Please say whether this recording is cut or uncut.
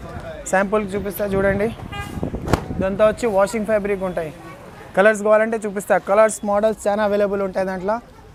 uncut